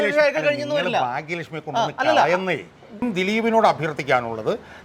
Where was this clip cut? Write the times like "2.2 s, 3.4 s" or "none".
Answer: 3.0 s